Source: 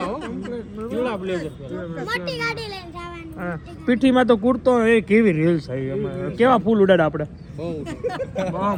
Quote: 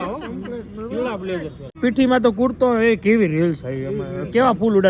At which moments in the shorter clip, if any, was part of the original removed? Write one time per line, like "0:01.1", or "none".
0:01.6